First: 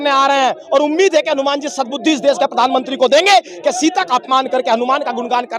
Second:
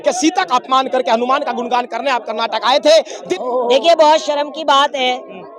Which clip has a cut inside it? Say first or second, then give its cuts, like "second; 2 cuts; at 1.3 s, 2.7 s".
second; 1 cut; at 3.1 s